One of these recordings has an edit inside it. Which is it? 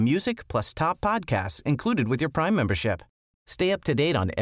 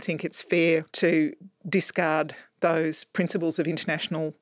second; 1 cut; at 0.9 s

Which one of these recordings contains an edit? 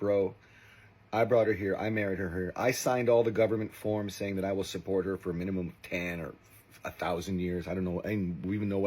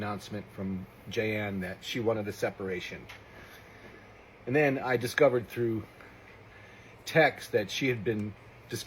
second; 1 cut; at 4.6 s

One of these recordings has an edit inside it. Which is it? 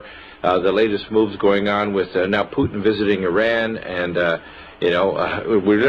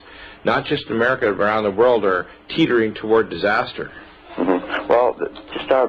first; 1 cut; at 4.7 s

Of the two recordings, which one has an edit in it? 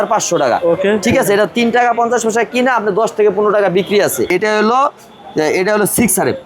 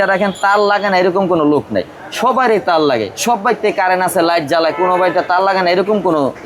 first; 1 cut; at 4.3 s

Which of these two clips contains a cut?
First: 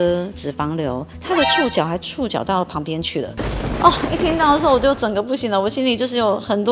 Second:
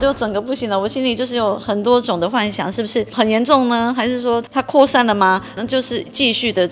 second; 3 cuts; at 3.1 s, 4.5 s, 5.5 s

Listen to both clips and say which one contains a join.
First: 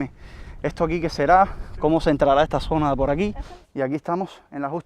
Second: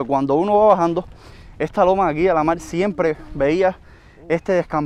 first; 1 cut; at 3.4 s

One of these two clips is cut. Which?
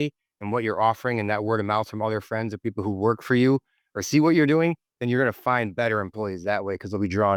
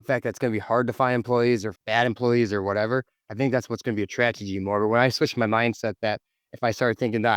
second; 1 cut; at 1.8 s

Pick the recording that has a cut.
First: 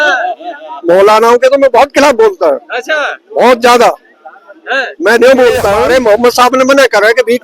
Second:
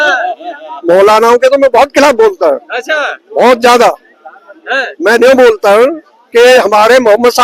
first; 1 cut; at 5.9 s

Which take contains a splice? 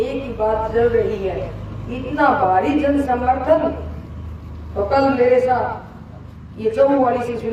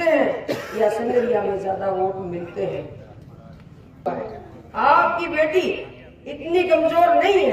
second; 1 cut; at 4.1 s

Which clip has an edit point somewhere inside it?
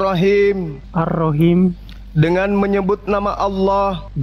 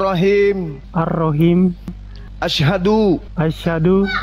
second; 1 cut; at 2.0 s

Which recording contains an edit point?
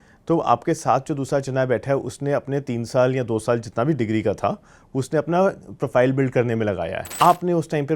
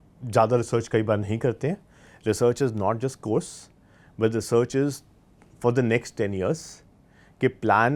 first; 1 cut; at 7.0 s

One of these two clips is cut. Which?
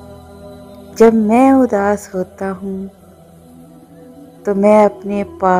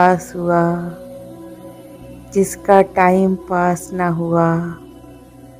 first; 3 cuts; at 1.0 s, 2.9 s, 4.5 s

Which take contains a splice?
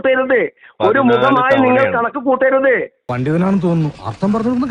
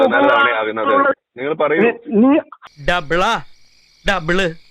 second; 1 cut; at 2.6 s

